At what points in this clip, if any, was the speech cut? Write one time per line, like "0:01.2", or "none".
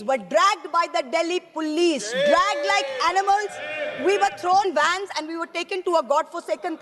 none